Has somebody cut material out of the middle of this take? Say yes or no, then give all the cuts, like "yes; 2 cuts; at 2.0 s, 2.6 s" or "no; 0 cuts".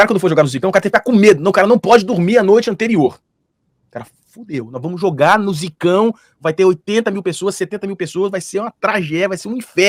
no; 0 cuts